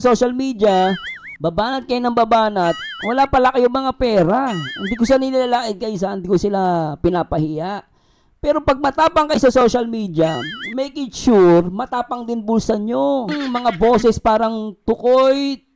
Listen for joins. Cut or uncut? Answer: cut